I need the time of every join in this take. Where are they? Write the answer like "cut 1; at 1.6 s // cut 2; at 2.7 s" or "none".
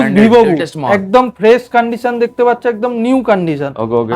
none